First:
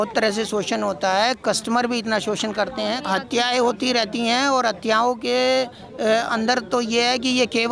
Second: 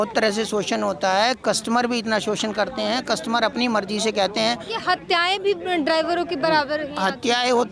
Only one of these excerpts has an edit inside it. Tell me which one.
first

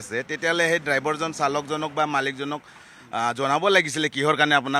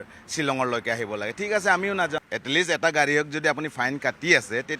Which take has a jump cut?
second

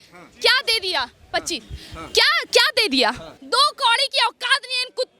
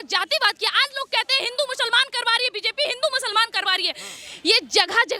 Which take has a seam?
first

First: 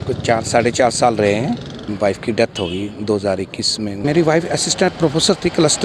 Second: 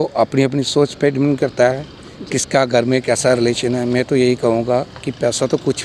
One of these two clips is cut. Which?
first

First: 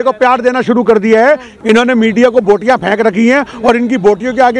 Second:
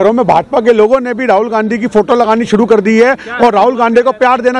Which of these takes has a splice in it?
first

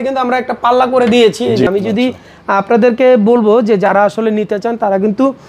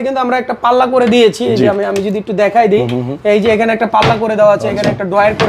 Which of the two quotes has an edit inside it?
first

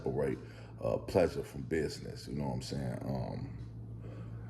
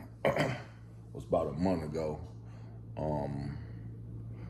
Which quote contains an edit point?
first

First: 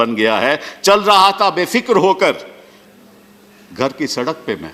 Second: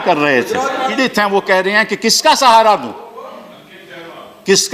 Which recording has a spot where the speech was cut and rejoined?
second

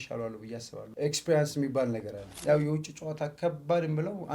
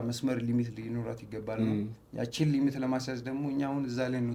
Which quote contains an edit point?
first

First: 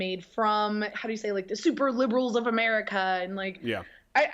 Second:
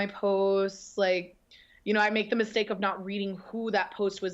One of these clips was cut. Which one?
first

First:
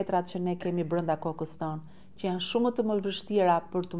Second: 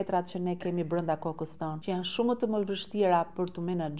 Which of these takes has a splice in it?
second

